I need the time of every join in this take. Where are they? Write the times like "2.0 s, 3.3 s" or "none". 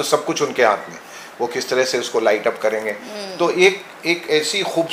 none